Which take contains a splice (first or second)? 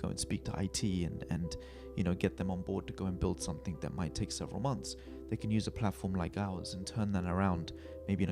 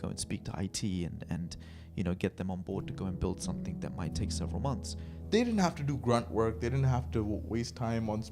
second